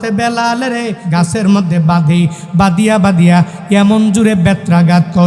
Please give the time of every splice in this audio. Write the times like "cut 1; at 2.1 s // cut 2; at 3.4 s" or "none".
cut 1; at 1.0 s

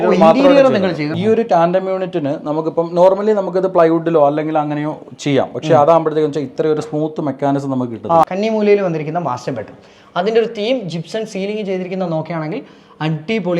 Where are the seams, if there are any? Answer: cut 1; at 1.1 s // cut 2; at 8.2 s

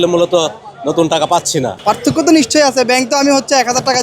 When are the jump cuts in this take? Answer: cut 1; at 1.7 s

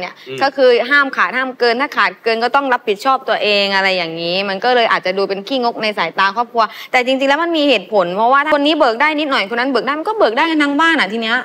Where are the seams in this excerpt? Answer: cut 1; at 8.4 s

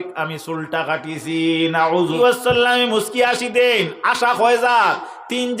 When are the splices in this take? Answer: cut 1; at 2.2 s

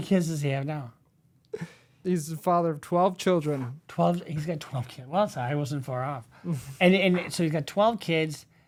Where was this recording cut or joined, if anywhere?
none

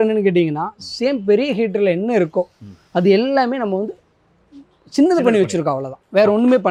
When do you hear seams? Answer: none

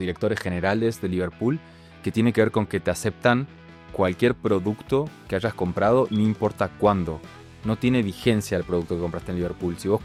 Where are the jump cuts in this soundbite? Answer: none

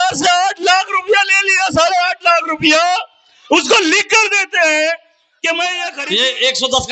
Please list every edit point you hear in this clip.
cut 1; at 5.9 s

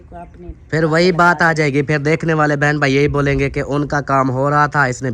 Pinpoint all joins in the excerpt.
none

